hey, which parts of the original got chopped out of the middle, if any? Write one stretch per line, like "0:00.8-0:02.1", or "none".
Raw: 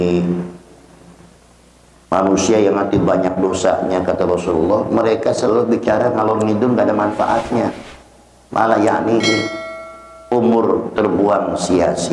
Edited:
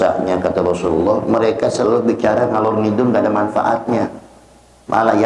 none